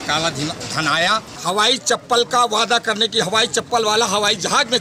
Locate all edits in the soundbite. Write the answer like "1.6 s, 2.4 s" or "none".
1.3 s